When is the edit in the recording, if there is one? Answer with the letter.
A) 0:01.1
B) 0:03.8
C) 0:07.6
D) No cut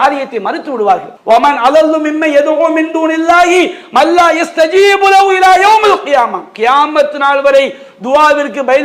A